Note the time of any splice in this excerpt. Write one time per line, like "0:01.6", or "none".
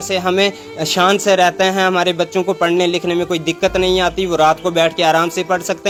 none

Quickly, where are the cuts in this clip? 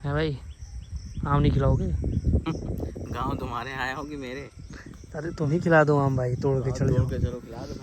none

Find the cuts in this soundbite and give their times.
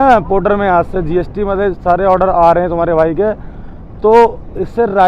none

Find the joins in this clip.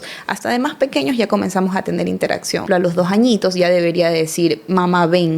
0:02.7

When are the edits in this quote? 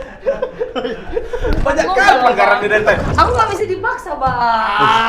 0:03.1

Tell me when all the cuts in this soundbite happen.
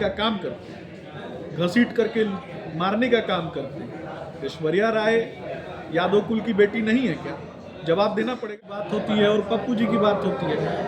0:08.5

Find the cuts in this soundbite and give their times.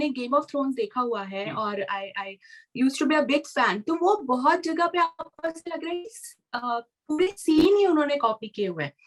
none

